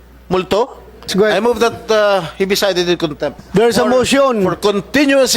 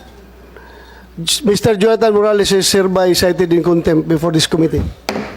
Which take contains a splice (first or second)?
first